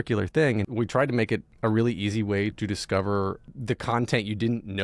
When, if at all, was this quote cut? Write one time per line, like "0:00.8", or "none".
0:01.1
0:02.6
0:03.5